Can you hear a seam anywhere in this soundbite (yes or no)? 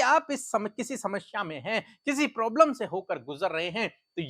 no